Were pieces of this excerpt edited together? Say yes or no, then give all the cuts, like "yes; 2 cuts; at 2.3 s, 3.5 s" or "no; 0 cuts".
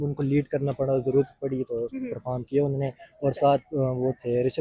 no; 0 cuts